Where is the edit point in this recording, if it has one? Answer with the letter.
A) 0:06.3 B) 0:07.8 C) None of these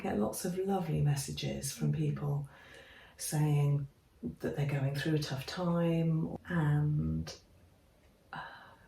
A